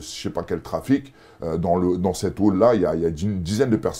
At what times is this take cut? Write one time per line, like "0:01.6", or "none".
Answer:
none

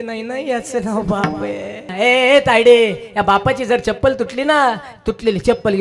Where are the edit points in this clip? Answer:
0:01.9

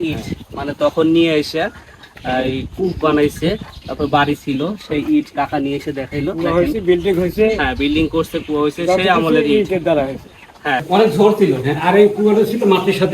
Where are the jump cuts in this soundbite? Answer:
0:10.8

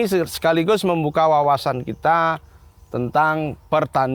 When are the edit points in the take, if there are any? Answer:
none

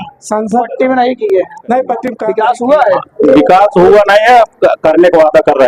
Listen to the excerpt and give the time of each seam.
0:02.2

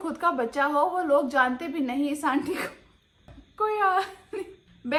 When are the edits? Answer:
none

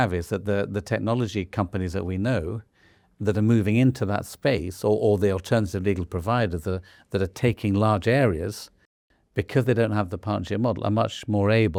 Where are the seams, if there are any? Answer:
none

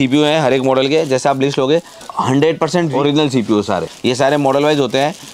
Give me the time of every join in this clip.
0:02.0
0:02.9
0:03.9

